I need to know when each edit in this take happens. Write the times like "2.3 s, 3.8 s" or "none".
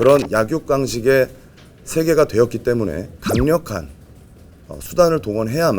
3.1 s